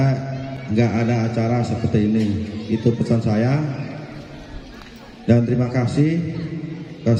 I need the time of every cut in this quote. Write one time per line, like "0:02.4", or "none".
none

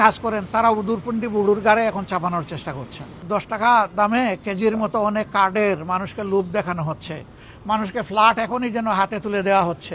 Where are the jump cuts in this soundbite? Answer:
0:03.2

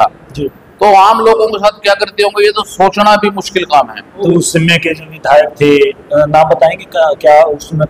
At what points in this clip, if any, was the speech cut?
0:04.2

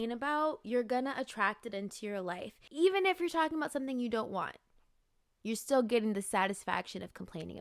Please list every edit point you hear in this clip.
0:02.6

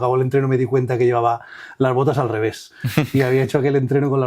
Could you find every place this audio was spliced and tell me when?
none

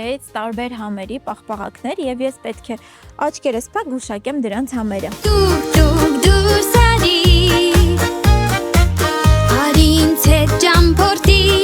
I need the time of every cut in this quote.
0:05.1

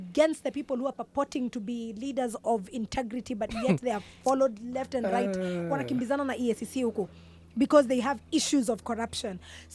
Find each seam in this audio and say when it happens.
none

